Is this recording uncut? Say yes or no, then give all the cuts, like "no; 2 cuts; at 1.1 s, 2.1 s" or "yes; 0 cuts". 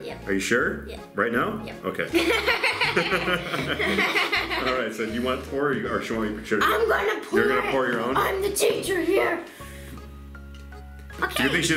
yes; 0 cuts